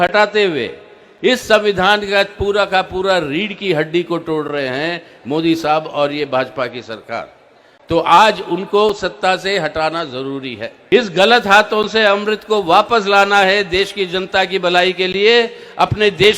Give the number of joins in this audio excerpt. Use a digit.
1